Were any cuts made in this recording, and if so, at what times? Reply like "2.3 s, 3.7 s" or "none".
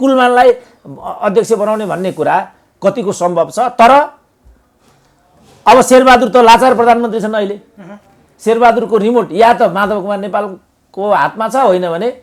none